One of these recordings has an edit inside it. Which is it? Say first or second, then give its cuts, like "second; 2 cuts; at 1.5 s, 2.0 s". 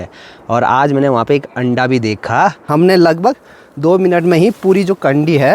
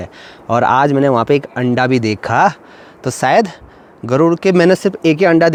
first; 1 cut; at 2.6 s